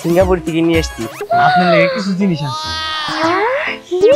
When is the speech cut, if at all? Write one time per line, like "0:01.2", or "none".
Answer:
0:01.2